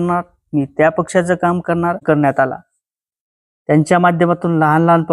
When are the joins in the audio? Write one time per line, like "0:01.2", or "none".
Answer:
0:02.0